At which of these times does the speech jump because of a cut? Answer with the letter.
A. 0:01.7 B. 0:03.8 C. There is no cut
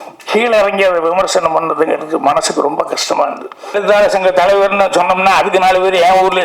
B